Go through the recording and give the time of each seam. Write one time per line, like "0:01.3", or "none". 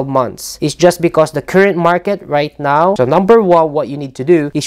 0:03.0